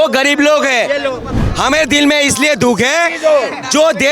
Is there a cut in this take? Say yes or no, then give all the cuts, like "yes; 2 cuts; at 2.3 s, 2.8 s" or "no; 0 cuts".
yes; 1 cut; at 1.4 s